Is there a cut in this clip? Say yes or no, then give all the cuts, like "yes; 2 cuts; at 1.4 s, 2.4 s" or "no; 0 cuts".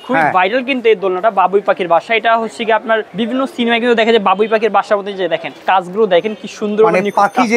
yes; 2 cuts; at 3.1 s, 5.5 s